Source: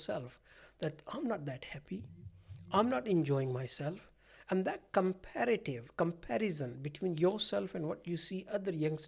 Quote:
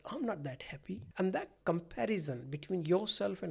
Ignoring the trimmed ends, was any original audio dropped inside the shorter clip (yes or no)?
yes